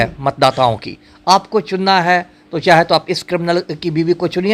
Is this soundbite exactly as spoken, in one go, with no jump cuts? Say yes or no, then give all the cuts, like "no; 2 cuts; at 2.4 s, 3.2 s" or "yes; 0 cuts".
yes; 0 cuts